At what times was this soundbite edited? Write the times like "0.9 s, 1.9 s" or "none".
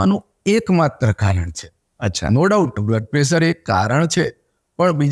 none